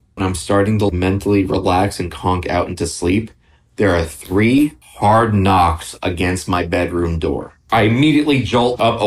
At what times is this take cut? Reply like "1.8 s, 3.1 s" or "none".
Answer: none